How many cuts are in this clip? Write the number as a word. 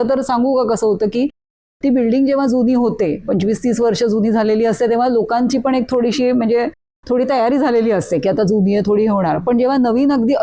zero